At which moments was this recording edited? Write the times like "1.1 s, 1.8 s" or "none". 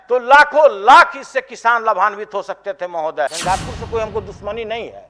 3.4 s